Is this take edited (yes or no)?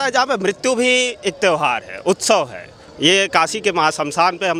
no